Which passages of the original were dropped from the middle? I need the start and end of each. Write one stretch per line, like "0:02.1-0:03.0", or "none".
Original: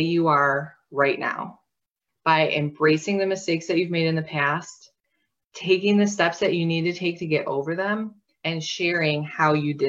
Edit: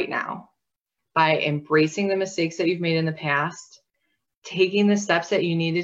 none